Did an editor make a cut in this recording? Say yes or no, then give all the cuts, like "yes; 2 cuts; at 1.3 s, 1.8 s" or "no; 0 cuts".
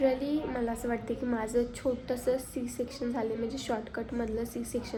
no; 0 cuts